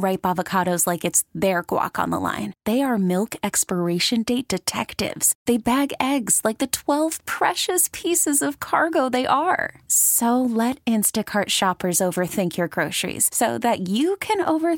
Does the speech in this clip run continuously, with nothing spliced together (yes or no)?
yes